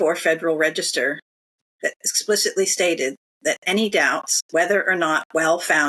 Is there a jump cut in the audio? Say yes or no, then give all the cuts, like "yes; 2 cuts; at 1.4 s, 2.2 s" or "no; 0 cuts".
yes; 1 cut; at 4.3 s